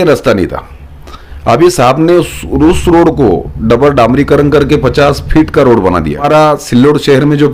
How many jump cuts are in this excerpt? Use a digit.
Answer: 1